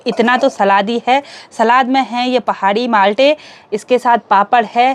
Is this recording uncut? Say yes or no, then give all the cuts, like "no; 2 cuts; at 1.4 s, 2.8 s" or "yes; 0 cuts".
yes; 0 cuts